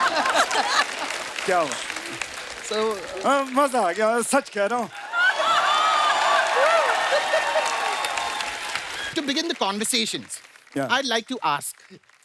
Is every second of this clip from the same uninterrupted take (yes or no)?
no